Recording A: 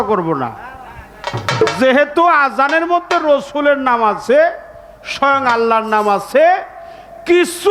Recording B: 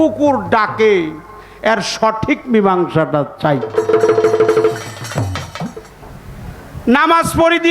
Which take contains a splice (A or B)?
B